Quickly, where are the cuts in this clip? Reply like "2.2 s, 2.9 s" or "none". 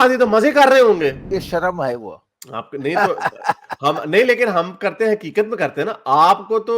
1.3 s

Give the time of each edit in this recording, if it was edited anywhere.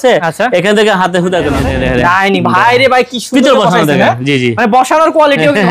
1.6 s

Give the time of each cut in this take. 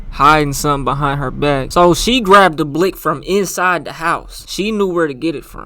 none

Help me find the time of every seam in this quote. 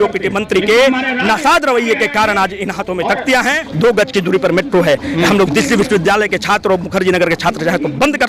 3.6 s

